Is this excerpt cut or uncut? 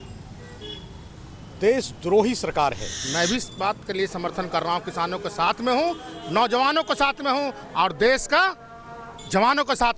cut